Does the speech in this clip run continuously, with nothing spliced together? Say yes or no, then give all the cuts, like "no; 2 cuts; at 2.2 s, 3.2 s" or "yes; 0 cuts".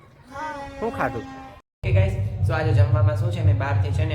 no; 1 cut; at 1.8 s